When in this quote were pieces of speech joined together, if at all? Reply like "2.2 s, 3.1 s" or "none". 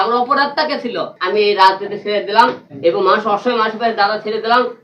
1.1 s, 2.7 s